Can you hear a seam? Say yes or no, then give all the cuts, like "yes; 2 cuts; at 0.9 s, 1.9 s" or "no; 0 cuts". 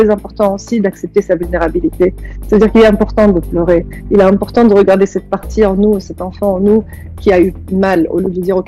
no; 0 cuts